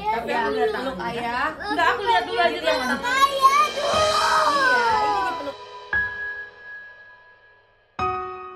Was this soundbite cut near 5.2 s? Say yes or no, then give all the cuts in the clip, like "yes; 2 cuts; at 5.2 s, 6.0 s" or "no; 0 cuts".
yes; 1 cut; at 5.2 s